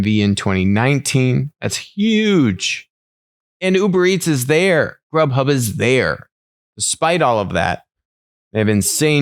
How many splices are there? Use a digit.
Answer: 0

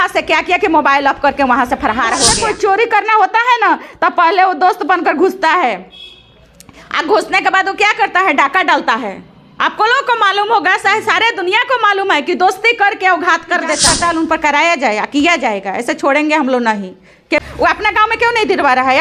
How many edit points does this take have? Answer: 3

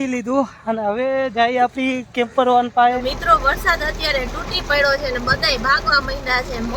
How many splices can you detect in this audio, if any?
1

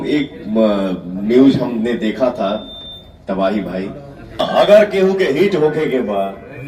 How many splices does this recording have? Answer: 1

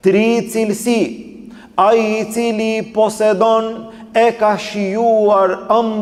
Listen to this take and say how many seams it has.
0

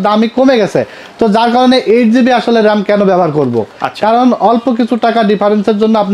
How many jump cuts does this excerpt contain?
0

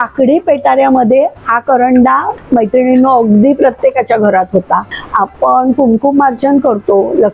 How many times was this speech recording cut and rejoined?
1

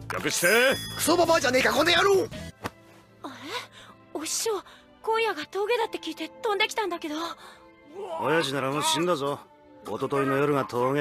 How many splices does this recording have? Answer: 1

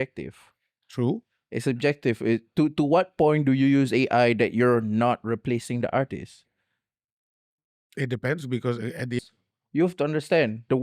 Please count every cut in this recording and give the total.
1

